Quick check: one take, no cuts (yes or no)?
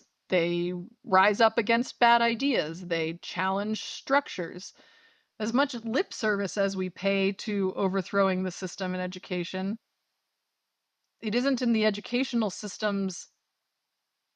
yes